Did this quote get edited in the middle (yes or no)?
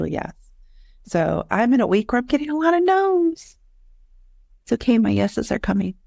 no